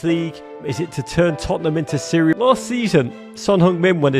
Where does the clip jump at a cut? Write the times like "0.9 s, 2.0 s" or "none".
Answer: 2.3 s